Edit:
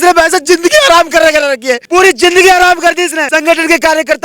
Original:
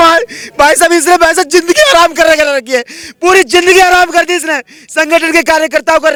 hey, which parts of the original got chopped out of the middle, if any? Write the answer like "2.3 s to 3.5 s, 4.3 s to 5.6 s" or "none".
2.8 s to 3.1 s, 4.5 s to 4.9 s